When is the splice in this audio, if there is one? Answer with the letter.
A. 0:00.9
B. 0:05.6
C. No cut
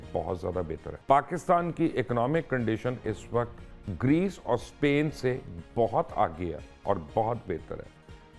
A